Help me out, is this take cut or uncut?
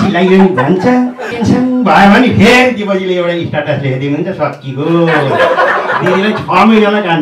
cut